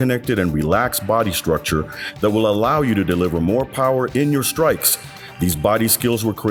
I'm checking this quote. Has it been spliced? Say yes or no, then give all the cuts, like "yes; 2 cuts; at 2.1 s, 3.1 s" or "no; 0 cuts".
no; 0 cuts